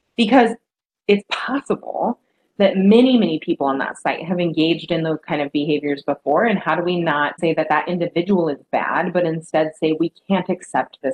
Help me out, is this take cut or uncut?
cut